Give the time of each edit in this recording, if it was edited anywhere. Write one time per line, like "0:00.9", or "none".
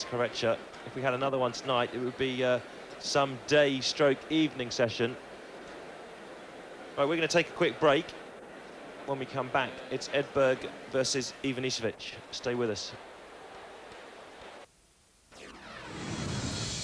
0:02.4